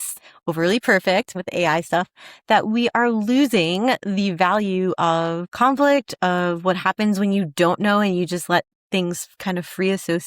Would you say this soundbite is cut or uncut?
cut